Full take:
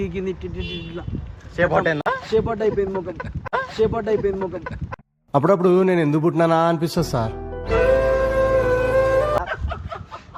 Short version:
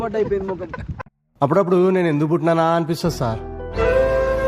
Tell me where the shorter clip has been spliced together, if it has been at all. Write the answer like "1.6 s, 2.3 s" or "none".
0.9 s